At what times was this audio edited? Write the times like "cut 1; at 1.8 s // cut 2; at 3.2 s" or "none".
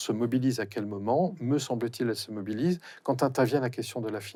none